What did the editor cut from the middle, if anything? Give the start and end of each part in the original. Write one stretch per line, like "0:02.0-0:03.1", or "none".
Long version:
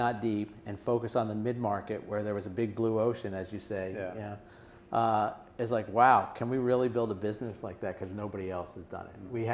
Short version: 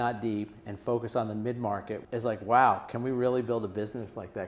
0:02.0-0:05.5